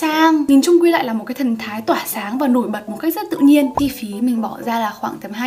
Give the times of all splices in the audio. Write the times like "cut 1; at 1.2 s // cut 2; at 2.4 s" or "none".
cut 1; at 3.7 s